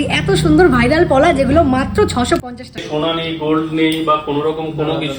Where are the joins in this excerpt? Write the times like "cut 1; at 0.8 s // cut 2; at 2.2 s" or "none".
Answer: cut 1; at 2.8 s